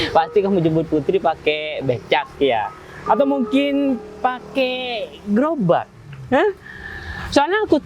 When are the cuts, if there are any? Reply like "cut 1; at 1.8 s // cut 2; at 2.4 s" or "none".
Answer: none